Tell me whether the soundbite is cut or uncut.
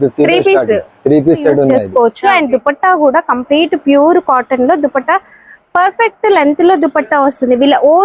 cut